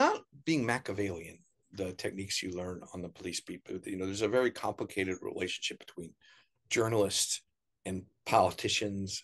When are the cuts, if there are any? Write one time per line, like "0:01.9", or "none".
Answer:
none